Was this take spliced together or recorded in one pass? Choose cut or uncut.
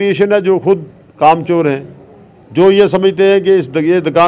uncut